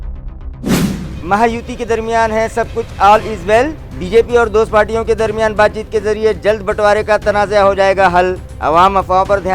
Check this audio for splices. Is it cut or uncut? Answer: cut